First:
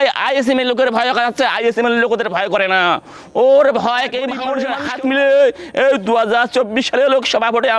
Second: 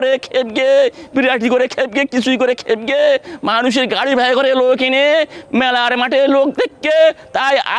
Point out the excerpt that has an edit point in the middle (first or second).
first